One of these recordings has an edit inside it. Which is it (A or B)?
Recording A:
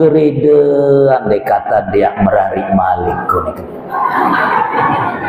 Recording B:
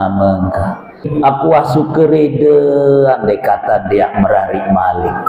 B